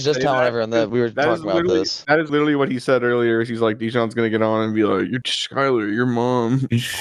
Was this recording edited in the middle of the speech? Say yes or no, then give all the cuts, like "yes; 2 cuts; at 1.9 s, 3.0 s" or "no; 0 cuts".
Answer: no; 0 cuts